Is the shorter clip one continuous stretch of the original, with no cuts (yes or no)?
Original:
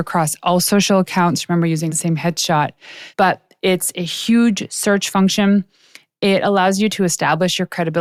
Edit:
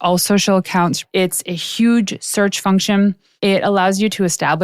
no